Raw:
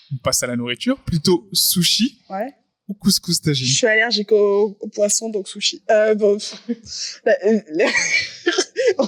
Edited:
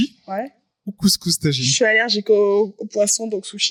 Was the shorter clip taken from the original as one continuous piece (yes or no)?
yes